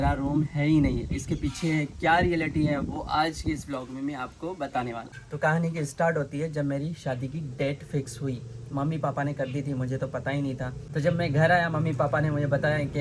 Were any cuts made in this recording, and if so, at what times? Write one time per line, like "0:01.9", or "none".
0:05.2